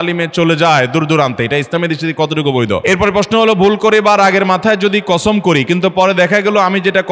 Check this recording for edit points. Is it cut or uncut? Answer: cut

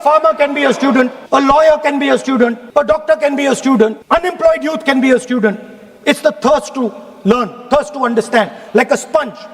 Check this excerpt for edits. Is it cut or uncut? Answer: cut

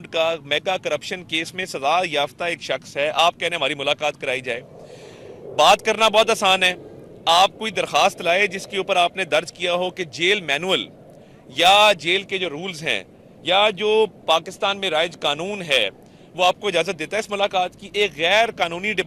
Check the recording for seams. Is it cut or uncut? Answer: uncut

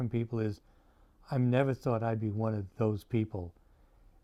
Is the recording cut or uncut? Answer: uncut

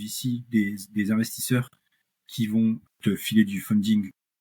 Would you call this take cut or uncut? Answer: cut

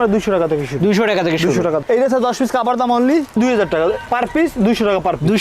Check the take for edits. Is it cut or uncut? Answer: cut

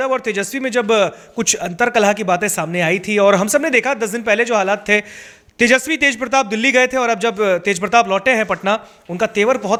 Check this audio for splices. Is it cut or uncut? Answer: uncut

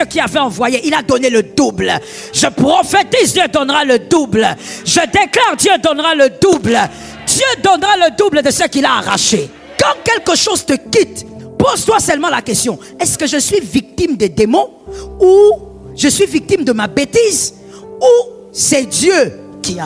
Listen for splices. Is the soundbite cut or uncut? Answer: cut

